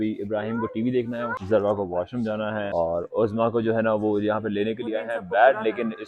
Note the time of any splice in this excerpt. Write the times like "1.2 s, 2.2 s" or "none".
1.3 s, 2.7 s